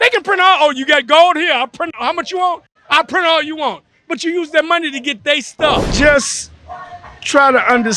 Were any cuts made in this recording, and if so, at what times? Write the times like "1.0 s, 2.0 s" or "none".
5.9 s